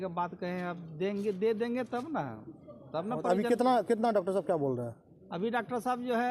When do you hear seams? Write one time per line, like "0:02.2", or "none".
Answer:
none